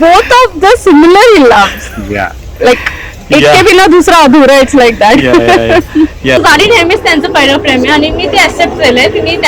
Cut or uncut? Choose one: cut